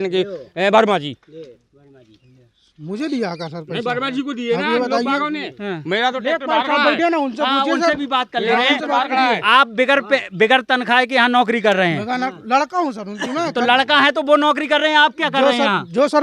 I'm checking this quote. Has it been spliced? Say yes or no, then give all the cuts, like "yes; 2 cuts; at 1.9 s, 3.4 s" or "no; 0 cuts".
no; 0 cuts